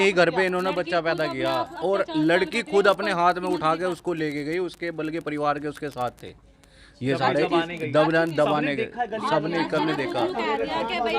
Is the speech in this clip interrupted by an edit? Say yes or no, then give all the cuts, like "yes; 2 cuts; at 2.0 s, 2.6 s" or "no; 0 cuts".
no; 0 cuts